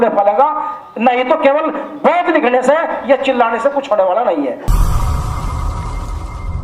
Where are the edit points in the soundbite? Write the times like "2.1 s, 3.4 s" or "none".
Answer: 4.7 s